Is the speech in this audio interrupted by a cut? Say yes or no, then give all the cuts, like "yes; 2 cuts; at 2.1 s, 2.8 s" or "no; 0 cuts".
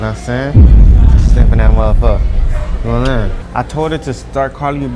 yes; 1 cut; at 3.4 s